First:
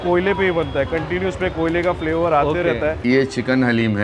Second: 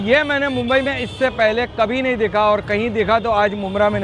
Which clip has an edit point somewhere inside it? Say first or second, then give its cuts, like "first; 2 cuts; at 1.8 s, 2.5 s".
first; 1 cut; at 3.0 s